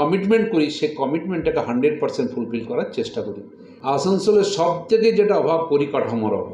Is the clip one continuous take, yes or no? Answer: no